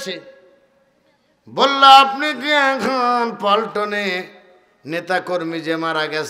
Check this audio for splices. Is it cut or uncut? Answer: uncut